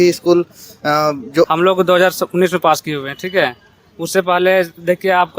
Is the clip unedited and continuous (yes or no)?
no